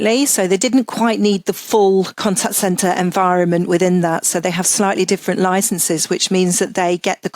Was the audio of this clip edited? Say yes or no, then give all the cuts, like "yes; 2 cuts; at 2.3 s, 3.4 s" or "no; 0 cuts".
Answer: yes; 1 cut; at 2.1 s